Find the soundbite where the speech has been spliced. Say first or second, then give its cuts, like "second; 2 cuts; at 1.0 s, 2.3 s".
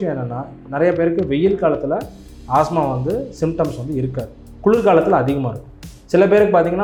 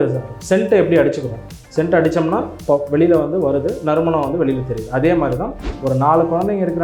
second; 1 cut; at 5.6 s